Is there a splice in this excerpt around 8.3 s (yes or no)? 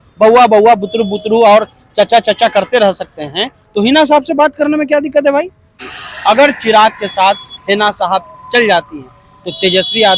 no